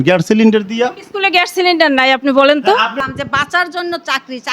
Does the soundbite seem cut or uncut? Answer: cut